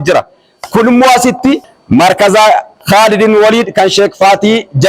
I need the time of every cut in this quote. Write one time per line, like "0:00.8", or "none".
0:01.7